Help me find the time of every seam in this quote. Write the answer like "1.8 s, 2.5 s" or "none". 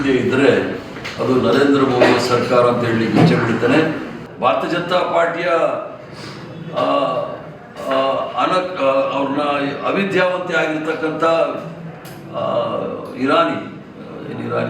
4.3 s